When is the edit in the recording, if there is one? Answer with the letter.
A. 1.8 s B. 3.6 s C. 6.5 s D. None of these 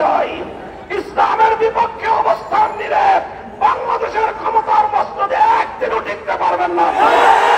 D